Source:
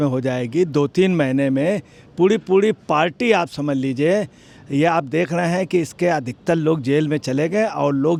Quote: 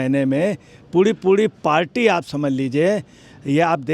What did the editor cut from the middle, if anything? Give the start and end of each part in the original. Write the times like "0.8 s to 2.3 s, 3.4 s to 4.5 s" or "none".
none